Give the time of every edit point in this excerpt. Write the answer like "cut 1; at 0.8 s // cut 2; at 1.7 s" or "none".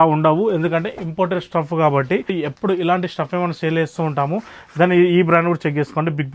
none